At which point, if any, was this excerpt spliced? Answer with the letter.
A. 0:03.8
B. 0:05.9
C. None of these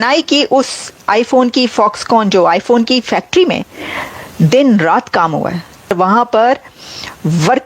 B